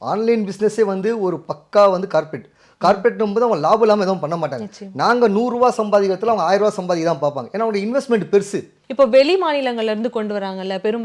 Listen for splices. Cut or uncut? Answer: cut